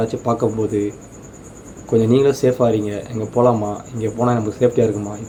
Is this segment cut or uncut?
uncut